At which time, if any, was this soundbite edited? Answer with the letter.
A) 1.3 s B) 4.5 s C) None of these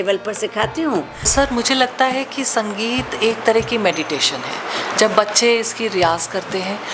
A